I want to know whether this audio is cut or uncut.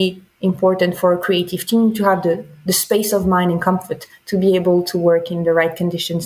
uncut